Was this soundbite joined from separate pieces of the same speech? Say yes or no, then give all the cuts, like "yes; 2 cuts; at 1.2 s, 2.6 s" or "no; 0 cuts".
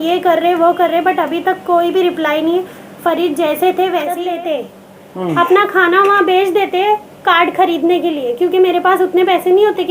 yes; 1 cut; at 4.2 s